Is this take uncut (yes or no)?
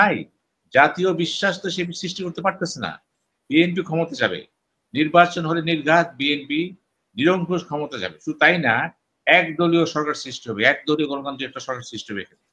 yes